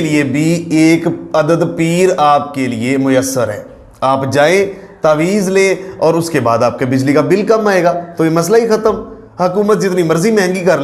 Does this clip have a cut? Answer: no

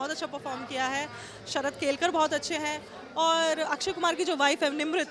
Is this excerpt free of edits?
yes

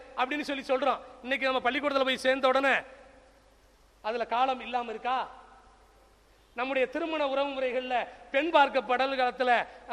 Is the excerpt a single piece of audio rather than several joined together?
yes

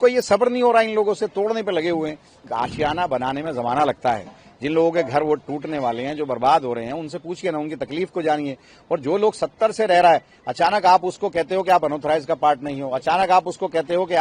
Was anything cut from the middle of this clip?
yes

